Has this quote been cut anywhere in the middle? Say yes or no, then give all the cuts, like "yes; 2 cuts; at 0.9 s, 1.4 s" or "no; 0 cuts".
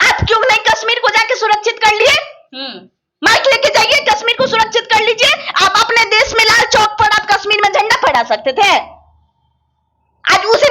no; 0 cuts